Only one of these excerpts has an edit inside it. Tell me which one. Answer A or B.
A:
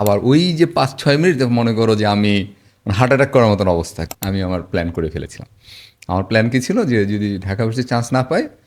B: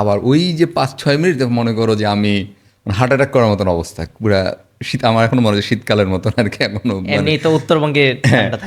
A